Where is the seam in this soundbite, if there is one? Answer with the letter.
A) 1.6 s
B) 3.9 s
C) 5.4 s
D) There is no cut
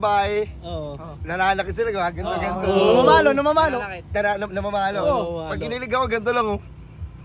D